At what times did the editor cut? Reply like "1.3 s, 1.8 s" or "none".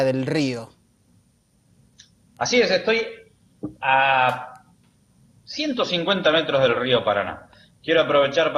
none